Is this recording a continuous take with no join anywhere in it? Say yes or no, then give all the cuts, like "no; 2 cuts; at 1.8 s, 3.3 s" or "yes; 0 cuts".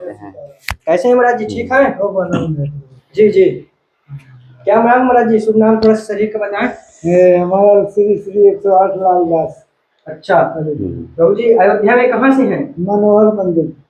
yes; 0 cuts